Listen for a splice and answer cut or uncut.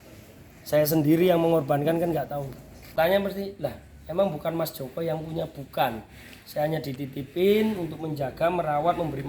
cut